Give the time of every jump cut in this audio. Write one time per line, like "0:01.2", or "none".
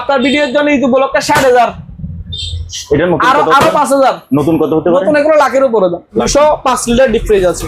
0:06.3